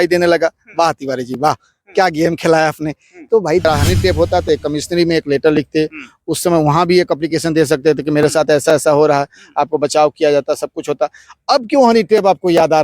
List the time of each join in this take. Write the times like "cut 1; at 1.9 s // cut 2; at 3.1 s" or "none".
cut 1; at 3.6 s